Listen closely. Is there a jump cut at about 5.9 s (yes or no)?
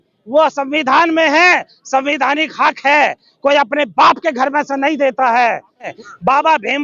yes